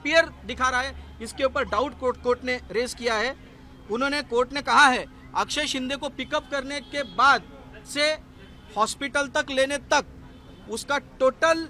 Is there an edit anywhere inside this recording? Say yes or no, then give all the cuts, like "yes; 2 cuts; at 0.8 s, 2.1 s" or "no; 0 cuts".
no; 0 cuts